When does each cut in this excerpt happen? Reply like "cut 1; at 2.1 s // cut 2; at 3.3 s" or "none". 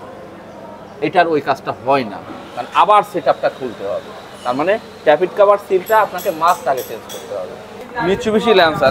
cut 1; at 7.9 s